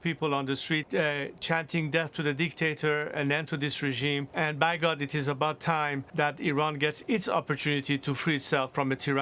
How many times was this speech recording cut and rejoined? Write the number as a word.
three